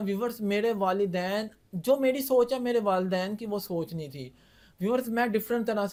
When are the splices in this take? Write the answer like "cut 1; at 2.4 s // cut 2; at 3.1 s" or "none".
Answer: none